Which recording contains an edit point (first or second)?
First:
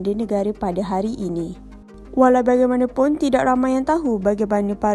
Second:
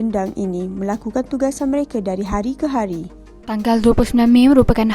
second